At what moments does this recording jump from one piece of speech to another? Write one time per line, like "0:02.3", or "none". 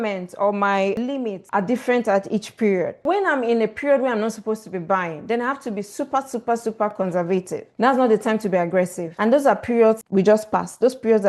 0:03.1